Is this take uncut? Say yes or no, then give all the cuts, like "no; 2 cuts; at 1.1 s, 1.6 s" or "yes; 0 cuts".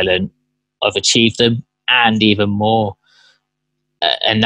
yes; 0 cuts